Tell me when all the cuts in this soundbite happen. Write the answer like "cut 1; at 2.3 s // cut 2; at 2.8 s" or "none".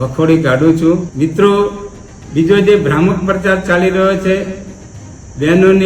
cut 1; at 1.1 s